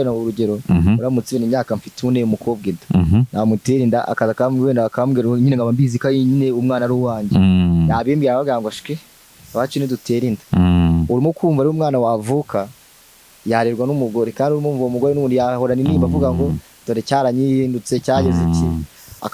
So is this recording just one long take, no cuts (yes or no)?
yes